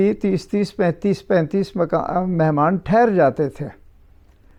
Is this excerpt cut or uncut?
uncut